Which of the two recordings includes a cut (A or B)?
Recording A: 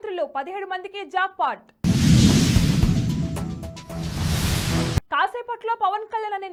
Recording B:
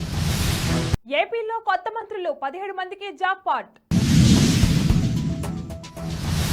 B